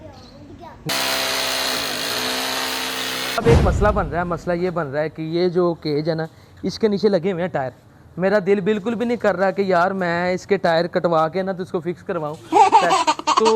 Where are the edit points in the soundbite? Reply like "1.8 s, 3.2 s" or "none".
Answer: 3.4 s, 12.5 s